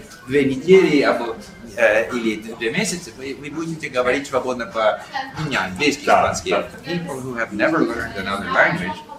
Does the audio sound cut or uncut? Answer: cut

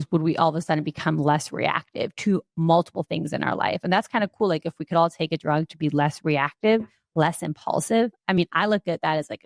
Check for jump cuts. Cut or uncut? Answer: uncut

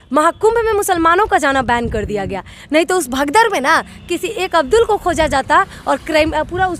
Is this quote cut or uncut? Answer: uncut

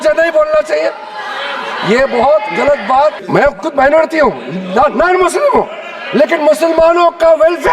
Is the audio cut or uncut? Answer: cut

